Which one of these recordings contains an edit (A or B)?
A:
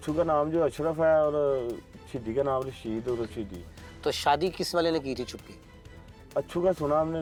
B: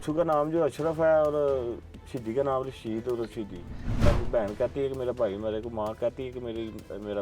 B